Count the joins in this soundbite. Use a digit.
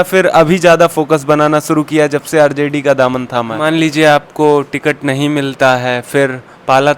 1